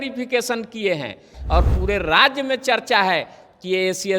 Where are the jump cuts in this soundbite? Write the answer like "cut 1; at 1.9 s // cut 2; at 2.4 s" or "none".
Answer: cut 1; at 1.3 s